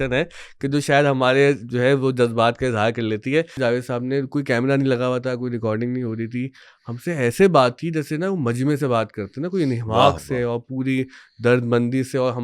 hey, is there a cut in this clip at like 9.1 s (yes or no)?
no